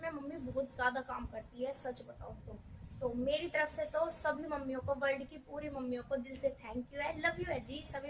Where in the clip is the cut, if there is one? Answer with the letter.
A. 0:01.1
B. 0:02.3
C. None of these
C